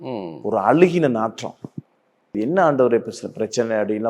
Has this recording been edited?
yes; 1 cut; at 2.3 s

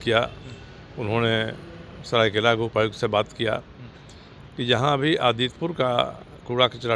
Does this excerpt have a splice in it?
no; 0 cuts

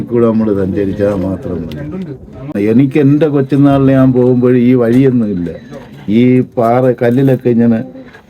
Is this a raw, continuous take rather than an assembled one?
no; 1 cut; at 2.5 s

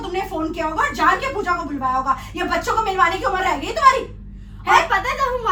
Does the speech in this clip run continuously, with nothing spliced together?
yes; 0 cuts

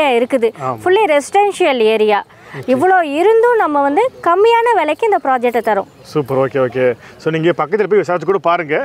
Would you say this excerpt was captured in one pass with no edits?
yes; 0 cuts

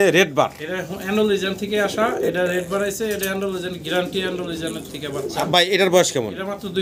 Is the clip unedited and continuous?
yes; 0 cuts

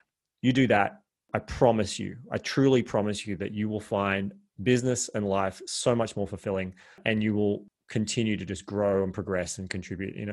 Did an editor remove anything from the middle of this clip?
yes; 3 cuts; at 1.3 s, 7.0 s, 7.8 s

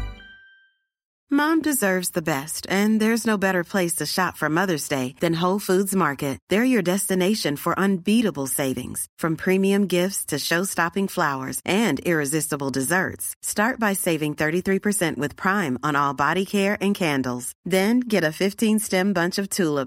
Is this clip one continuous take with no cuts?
no; 1 cut; at 1.1 s

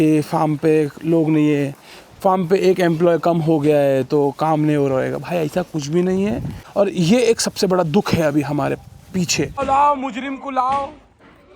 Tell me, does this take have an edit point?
yes; 2 cuts; at 6.6 s, 9.6 s

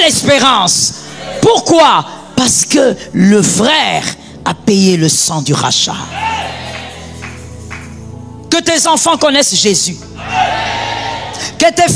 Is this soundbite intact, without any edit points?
yes; 0 cuts

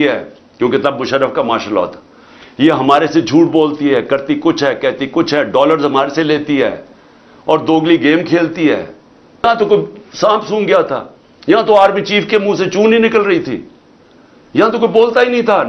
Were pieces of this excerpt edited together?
yes; 1 cut; at 9.4 s

